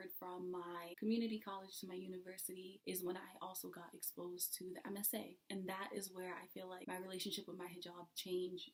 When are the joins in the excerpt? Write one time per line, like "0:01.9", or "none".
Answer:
none